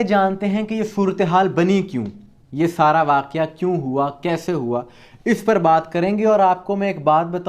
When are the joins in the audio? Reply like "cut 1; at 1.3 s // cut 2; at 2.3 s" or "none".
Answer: none

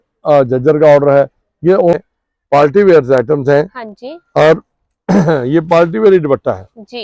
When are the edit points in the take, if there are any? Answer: cut 1; at 1.9 s

